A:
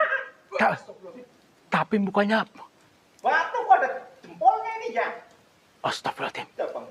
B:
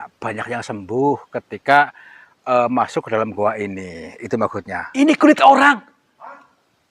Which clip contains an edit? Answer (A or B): B